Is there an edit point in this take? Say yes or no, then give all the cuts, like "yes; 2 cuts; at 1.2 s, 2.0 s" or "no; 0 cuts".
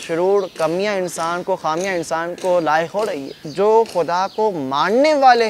yes; 1 cut; at 3.4 s